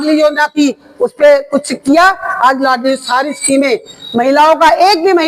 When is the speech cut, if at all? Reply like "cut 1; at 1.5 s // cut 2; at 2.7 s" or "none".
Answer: none